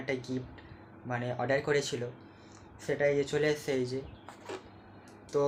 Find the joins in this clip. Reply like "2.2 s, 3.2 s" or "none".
none